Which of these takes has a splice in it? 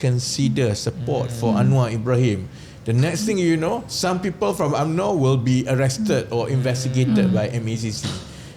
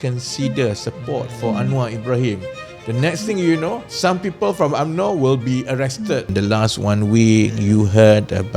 second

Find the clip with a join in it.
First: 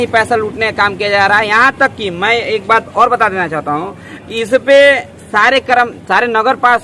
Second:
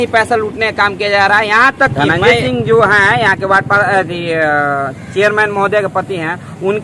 second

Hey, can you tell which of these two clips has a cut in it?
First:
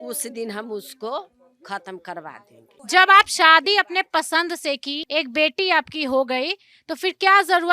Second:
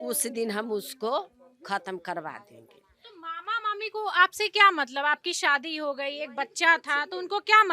first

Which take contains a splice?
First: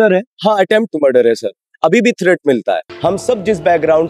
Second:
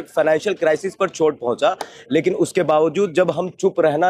first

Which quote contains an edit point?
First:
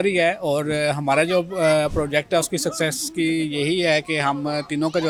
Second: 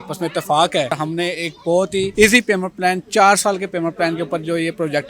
second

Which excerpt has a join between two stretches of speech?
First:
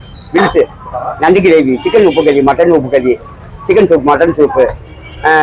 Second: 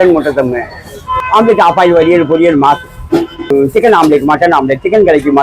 second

